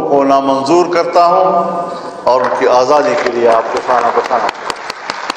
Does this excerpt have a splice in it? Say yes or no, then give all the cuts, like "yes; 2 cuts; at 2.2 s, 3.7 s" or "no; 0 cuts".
no; 0 cuts